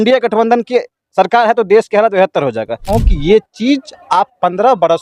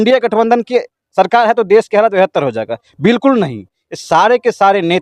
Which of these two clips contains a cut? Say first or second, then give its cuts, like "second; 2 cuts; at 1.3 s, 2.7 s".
first; 1 cut; at 2.9 s